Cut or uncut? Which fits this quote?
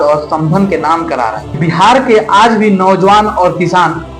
cut